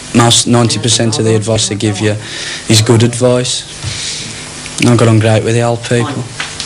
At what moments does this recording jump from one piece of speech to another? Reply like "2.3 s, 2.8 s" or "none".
none